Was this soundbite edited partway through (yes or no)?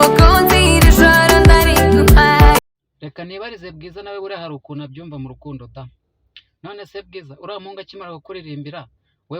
yes